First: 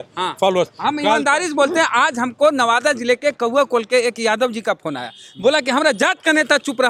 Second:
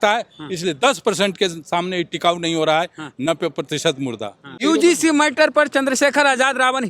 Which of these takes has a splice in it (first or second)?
second